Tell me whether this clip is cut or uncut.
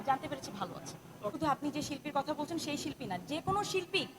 cut